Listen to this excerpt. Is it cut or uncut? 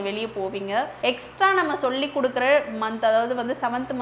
cut